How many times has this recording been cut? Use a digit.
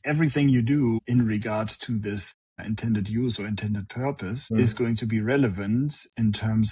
0